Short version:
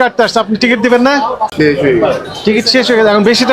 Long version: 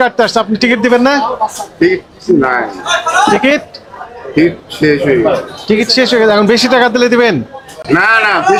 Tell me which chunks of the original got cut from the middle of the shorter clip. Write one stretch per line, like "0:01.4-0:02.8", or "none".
0:01.5-0:04.7